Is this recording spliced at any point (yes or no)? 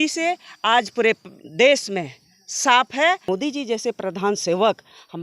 yes